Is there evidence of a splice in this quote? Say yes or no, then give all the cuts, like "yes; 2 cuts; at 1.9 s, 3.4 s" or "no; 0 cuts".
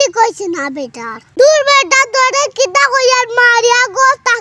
yes; 1 cut; at 1.3 s